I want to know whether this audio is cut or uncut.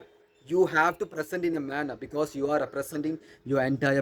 uncut